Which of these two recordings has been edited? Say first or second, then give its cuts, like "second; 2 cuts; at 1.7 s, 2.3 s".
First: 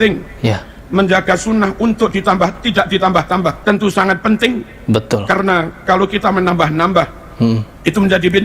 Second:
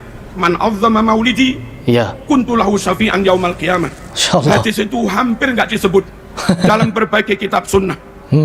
first; 1 cut; at 3.6 s